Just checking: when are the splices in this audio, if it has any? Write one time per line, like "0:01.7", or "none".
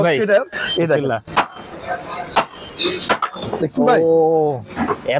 0:01.6
0:02.6